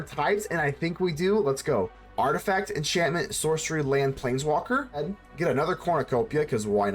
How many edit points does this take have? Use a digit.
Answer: 2